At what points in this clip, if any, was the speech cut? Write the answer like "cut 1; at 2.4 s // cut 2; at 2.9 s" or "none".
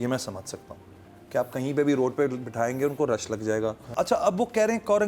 cut 1; at 3.8 s